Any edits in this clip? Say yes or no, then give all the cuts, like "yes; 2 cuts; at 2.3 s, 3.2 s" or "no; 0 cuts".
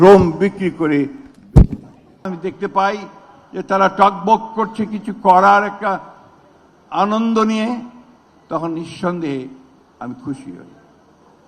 yes; 1 cut; at 2.3 s